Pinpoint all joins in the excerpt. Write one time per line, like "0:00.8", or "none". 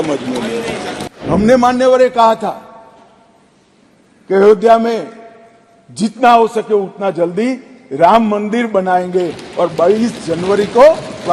0:01.2

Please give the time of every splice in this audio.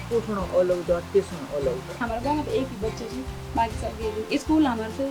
0:02.0
0:03.4

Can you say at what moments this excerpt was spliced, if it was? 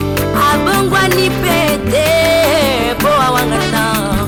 none

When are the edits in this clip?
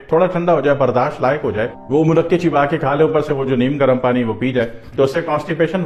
none

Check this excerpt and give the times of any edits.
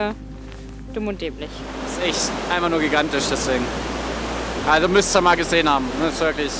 0:01.6

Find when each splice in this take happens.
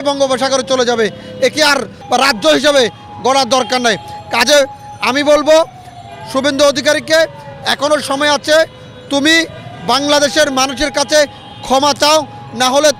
0:02.0

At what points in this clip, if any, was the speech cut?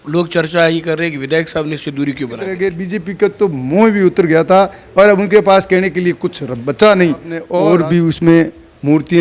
0:02.5
0:07.4

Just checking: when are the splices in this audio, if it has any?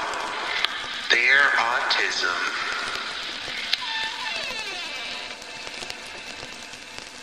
none

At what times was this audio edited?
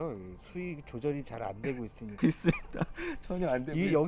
0:02.2

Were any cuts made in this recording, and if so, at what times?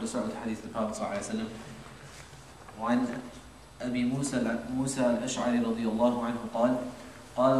0:01.1

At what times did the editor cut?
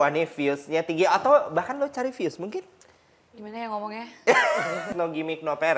0:04.9

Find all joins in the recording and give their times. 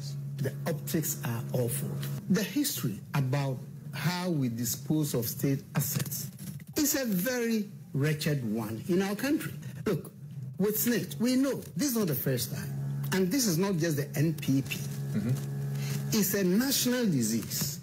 0:02.1
0:09.6

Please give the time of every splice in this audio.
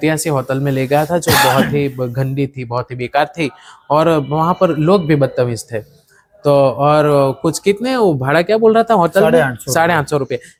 none

